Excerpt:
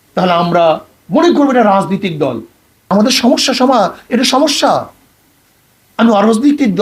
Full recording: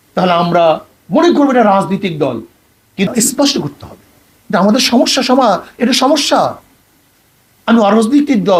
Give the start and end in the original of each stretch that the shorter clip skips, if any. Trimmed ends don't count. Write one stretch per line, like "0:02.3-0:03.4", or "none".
0:02.9-0:04.6